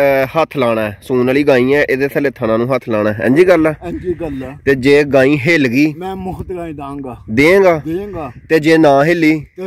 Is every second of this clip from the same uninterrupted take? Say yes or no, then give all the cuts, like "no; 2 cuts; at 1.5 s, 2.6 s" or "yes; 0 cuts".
yes; 0 cuts